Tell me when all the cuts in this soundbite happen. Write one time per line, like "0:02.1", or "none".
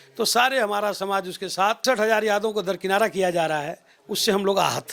0:01.8